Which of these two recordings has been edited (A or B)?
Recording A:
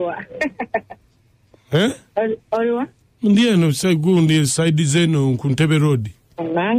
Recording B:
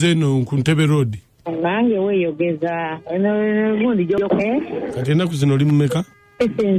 B